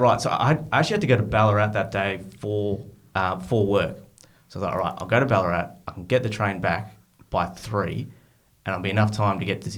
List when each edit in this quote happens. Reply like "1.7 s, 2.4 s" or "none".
none